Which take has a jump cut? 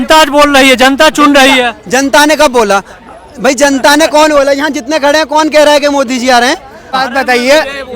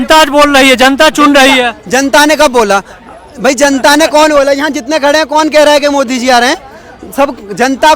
first; 1 cut; at 6.8 s

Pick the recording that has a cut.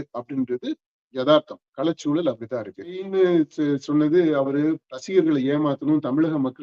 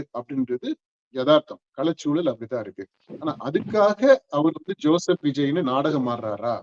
first; 1 cut; at 3.0 s

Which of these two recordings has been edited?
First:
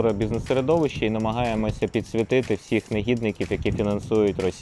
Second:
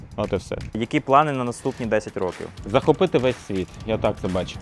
second; 2 cuts; at 0.8 s, 2.5 s

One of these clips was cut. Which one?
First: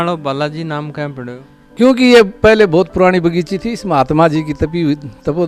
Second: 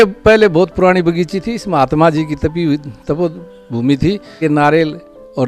second; 1 cut; at 4.3 s

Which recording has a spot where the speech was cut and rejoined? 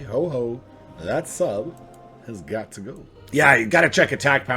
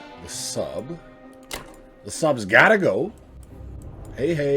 first; 1 cut; at 3.1 s

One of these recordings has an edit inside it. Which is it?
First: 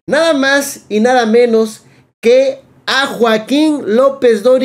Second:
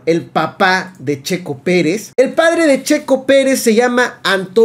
second; 1 cut; at 2.0 s

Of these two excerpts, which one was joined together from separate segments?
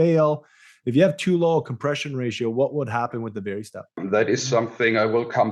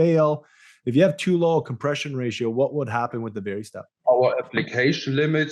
second; 1 cut; at 3.9 s

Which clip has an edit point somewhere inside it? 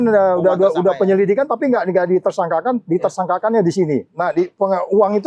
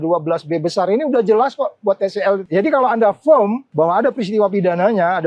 second; 2 cuts; at 2.4 s, 3.6 s

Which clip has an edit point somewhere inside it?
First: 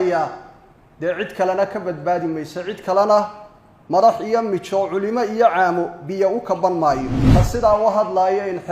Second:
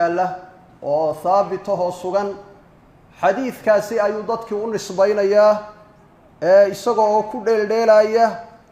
first; 1 cut; at 7.1 s

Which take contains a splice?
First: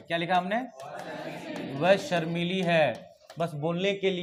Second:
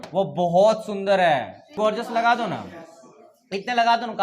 second; 1 cut; at 1.7 s

